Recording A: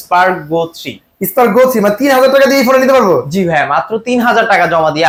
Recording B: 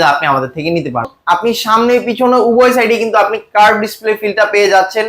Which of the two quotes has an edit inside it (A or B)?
B